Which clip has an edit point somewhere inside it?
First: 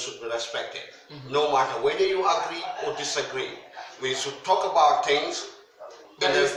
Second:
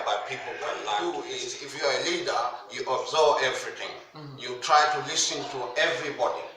second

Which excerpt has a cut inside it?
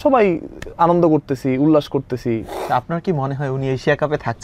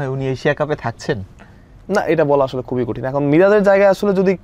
first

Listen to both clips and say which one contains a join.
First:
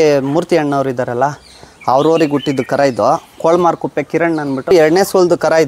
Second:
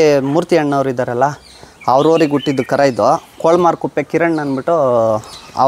first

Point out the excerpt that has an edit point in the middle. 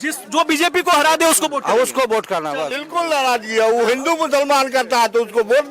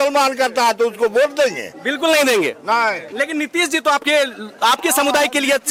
first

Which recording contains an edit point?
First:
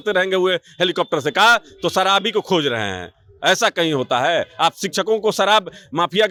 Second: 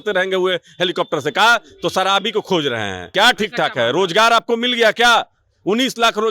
second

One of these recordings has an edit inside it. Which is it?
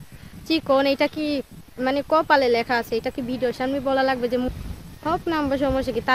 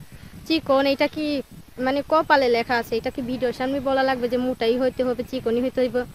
first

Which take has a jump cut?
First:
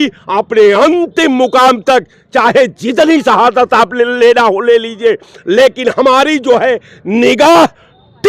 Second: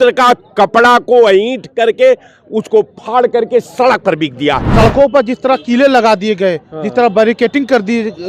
second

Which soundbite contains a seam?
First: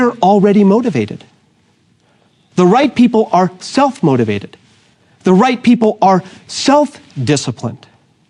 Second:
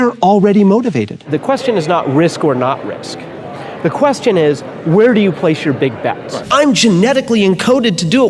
second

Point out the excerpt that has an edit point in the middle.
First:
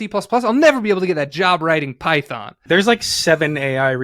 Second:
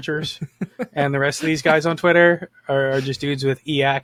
first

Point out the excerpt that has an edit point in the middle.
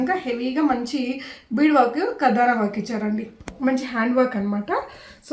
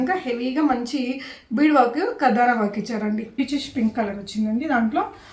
second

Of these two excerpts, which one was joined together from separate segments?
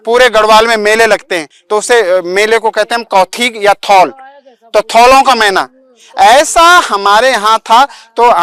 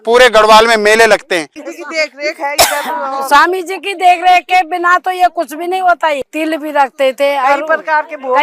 second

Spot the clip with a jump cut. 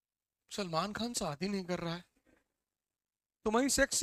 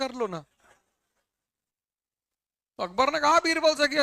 second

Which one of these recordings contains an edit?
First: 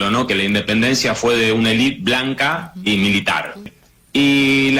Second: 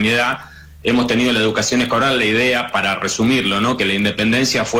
first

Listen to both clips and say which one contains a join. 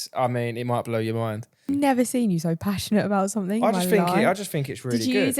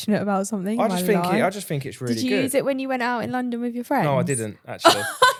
first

